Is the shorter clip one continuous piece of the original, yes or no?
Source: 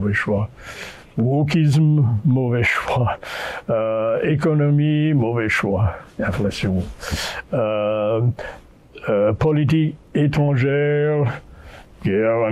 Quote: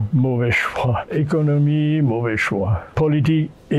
no